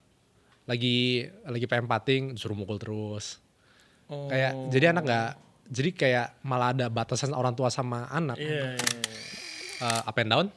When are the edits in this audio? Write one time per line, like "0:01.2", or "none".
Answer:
0:09.4